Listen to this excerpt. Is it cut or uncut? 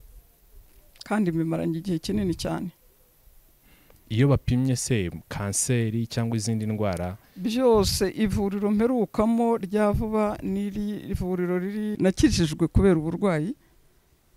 cut